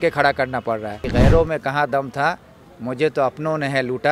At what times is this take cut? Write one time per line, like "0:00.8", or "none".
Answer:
0:01.0